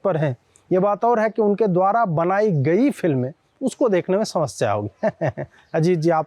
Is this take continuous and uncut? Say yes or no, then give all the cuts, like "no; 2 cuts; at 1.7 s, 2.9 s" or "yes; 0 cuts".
yes; 0 cuts